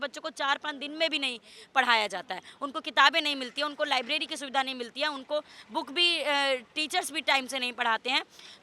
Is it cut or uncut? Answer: uncut